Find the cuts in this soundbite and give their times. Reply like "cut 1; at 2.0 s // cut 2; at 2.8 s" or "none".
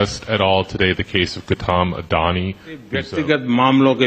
cut 1; at 3.0 s